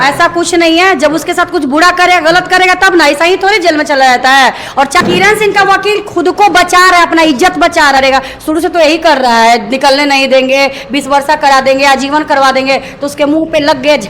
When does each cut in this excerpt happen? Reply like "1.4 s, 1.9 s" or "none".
none